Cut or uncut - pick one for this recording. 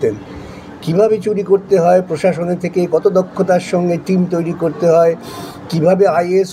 uncut